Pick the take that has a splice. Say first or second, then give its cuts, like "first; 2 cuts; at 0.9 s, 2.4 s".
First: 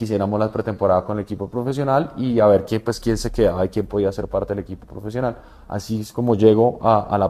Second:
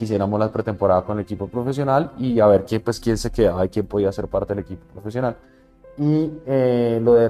second; 1 cut; at 5.5 s